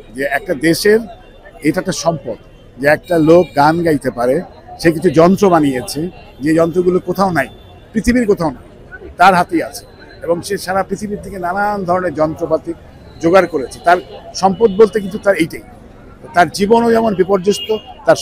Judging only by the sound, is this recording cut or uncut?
uncut